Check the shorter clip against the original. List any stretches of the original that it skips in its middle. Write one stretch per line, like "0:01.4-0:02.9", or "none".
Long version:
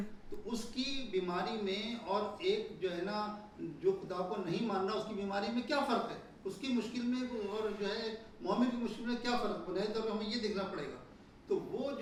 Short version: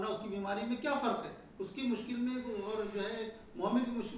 none

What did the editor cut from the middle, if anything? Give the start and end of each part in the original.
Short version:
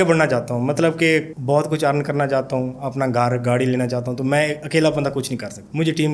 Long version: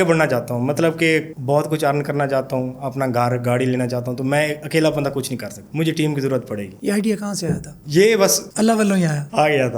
none

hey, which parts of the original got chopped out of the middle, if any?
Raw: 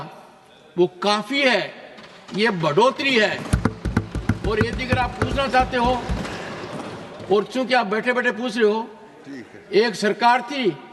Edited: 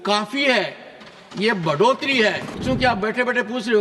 0:03.6-0:07.5

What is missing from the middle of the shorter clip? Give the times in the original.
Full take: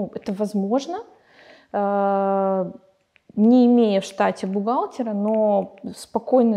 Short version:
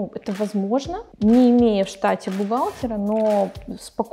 0:01.0-0:03.2

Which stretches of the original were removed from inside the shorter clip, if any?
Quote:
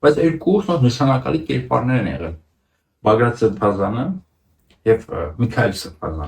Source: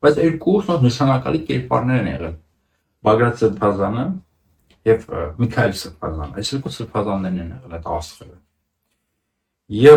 none

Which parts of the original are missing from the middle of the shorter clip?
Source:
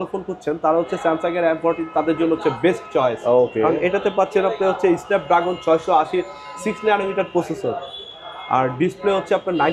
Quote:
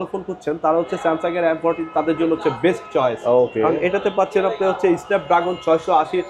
none

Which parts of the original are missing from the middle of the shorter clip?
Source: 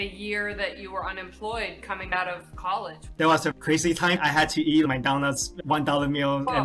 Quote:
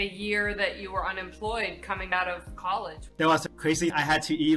0:03.7-0:03.9

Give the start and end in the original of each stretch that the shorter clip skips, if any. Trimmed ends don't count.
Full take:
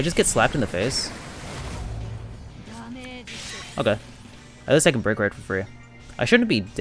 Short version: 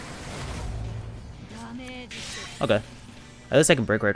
none

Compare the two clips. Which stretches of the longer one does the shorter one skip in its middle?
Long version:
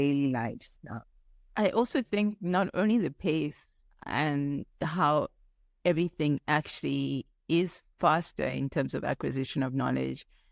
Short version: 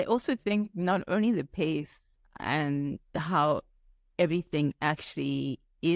none

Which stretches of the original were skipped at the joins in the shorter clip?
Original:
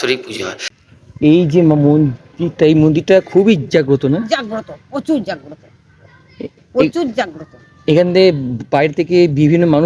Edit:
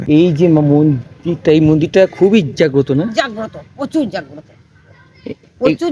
none

